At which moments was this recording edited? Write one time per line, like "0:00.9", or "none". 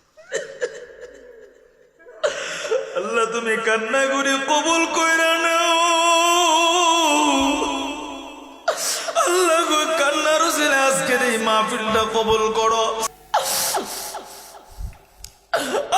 0:13.0